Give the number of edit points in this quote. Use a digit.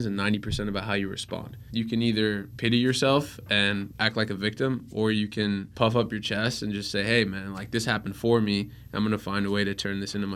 4